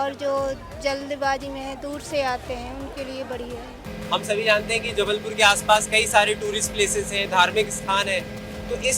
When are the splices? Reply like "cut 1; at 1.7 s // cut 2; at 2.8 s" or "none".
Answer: cut 1; at 3.8 s